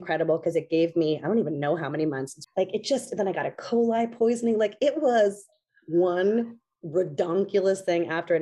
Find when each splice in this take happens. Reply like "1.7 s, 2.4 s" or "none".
2.3 s

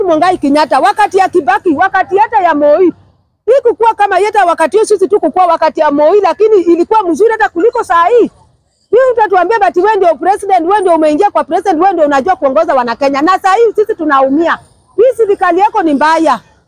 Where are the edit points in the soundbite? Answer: none

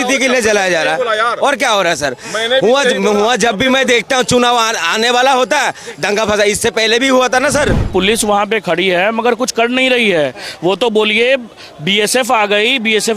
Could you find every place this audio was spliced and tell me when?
7.9 s

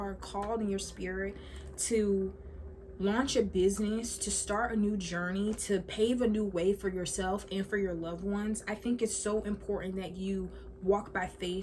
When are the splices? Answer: none

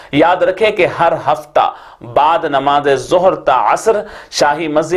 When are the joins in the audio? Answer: none

